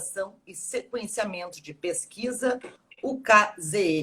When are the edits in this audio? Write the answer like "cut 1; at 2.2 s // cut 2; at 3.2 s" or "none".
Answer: cut 1; at 2.4 s

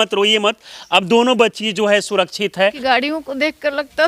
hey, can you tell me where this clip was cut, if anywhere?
cut 1; at 2.8 s

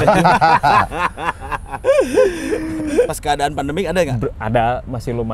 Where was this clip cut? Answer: cut 1; at 3.1 s

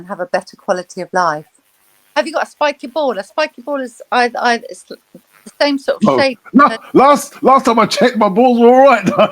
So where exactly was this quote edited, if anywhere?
cut 1; at 1.8 s

